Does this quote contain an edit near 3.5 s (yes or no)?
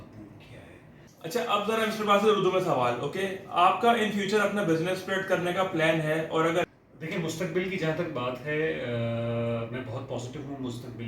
no